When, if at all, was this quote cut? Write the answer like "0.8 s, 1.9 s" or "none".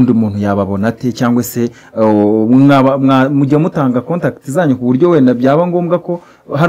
none

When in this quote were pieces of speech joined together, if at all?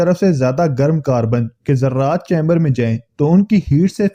none

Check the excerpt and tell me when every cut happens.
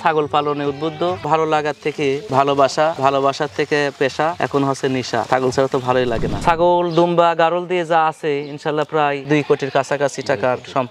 1.2 s, 6.4 s

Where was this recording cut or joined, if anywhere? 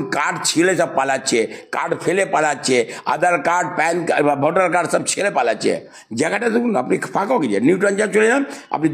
none

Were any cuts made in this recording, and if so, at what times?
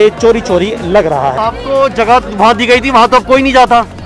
1.3 s

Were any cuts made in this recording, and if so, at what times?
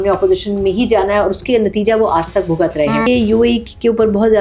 3.1 s

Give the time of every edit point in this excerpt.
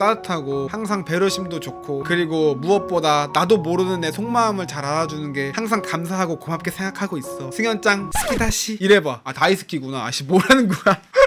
none

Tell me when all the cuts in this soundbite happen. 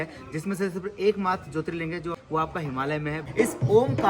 2.2 s, 3.2 s

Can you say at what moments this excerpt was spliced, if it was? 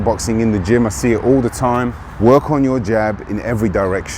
2.0 s

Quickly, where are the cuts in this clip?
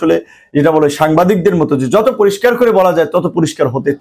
none

